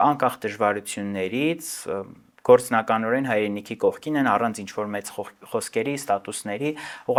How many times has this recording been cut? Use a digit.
0